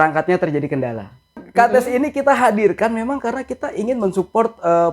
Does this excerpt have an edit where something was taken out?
yes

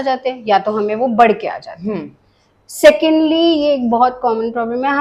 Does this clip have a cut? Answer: no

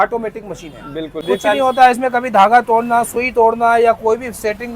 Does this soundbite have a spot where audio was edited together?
yes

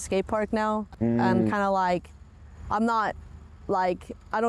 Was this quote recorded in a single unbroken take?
yes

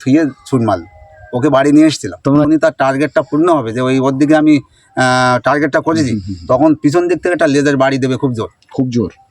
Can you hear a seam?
yes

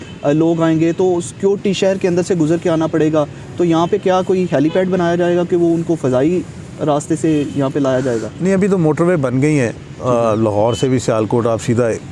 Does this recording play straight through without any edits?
yes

